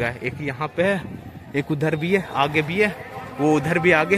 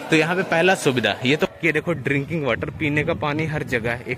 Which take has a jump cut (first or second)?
second